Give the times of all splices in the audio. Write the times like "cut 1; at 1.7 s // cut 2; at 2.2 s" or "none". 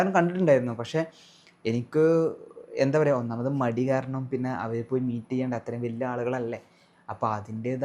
none